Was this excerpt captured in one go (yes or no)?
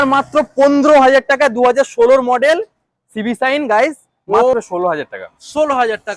no